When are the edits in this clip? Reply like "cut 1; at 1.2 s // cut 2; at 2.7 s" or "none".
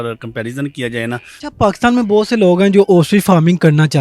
cut 1; at 1.3 s